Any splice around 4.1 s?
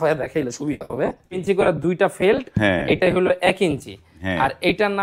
no; 1 cut; at 1.4 s

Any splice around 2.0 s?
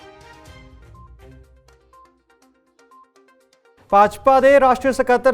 yes; 1 cut; at 2.0 s

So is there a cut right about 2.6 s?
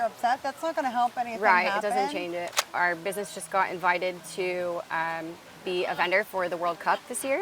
yes; 1 cut; at 2.6 s

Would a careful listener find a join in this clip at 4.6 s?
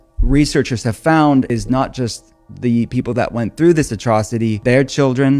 yes; 2 cuts; at 1.5 s, 4.6 s

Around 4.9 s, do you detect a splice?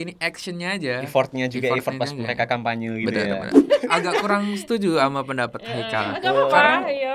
no; 1 cut; at 3.6 s

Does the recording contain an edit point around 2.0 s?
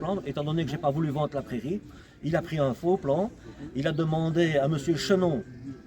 no; 0 cuts

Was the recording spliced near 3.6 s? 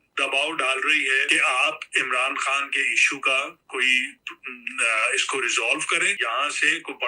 no; 2 cuts; at 1.2 s, 6.2 s

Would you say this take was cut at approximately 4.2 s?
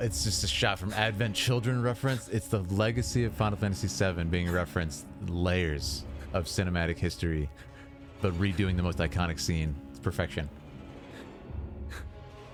no; 0 cuts

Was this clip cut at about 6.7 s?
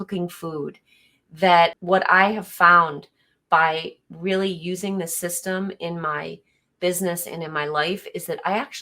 no; 1 cut; at 1.8 s

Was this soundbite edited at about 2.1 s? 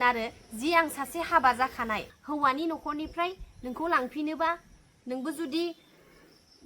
yes; 1 cut; at 2.1 s

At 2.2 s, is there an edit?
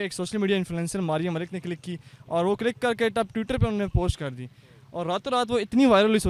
no; 0 cuts

